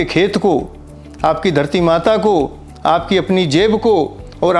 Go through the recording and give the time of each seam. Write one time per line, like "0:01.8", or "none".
none